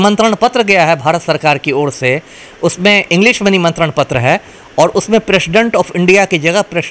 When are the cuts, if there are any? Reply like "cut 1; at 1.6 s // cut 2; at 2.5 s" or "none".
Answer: none

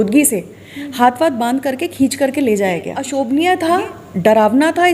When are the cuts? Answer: cut 1; at 3.0 s

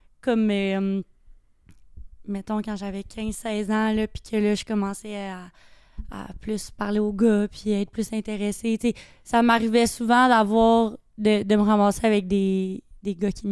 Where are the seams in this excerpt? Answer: none

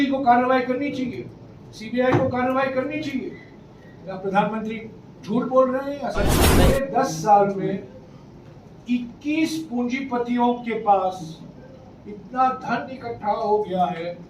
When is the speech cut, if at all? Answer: cut 1; at 6.5 s

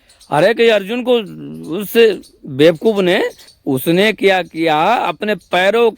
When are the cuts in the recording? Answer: cut 1; at 3.4 s

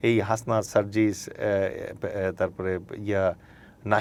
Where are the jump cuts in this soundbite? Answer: none

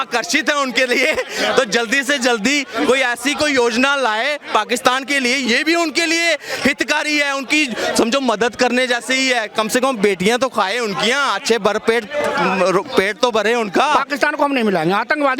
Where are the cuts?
cut 1; at 14.0 s

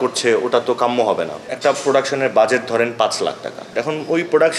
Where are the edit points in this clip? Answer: cut 1; at 1.5 s // cut 2; at 3.7 s

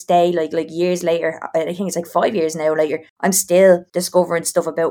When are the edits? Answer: cut 1; at 3.1 s // cut 2; at 3.9 s

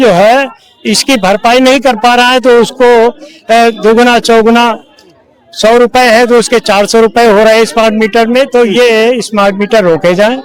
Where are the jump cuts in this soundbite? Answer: none

